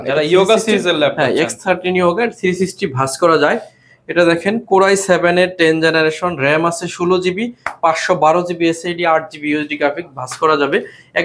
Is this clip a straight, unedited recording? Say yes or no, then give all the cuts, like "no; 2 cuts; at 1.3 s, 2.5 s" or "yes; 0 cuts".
yes; 0 cuts